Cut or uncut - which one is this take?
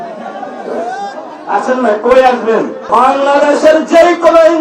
cut